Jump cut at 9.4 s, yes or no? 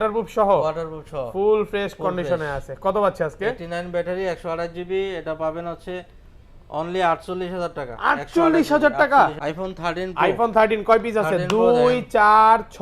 yes